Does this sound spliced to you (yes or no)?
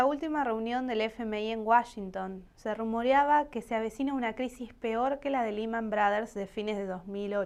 no